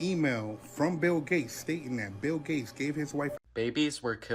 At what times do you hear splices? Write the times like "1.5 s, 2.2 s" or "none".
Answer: 3.4 s